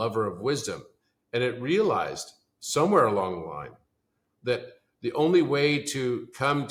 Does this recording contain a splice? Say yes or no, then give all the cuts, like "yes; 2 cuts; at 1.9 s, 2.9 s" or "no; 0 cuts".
no; 0 cuts